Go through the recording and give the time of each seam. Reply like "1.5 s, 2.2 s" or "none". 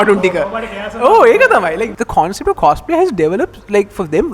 1.9 s